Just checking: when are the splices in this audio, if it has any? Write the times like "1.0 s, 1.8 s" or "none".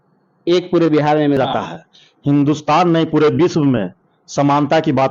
1.4 s